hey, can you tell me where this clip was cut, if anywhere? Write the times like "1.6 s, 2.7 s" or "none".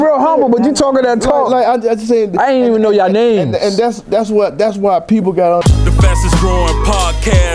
5.6 s